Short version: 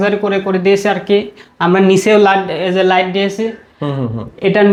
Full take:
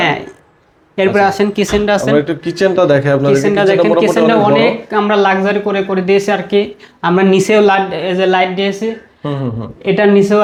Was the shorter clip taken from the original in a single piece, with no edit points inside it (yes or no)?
yes